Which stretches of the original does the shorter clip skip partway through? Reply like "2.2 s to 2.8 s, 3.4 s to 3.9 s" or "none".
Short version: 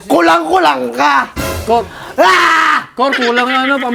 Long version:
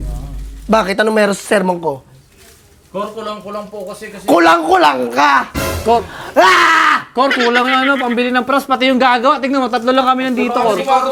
none

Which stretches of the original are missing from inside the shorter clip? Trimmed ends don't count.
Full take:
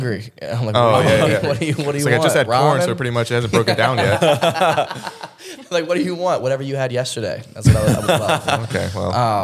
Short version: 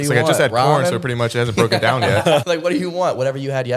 4.4 s to 5.7 s

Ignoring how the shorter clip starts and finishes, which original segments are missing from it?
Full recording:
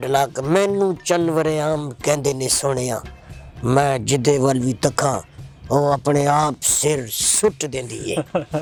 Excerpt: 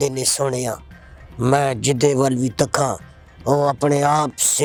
none

